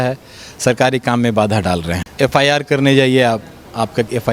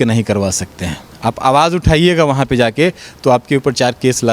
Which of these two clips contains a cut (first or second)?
first